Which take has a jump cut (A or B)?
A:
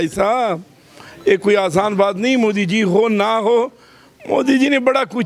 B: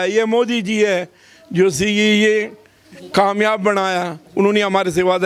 B